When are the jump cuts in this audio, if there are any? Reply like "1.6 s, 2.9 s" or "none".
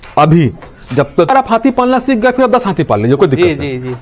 1.3 s